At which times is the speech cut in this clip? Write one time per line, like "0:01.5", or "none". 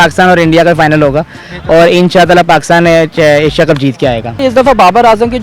0:04.4